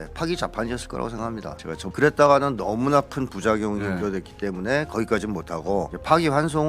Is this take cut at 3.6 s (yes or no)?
no